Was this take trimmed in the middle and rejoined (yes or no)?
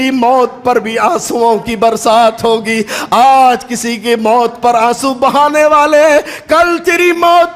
no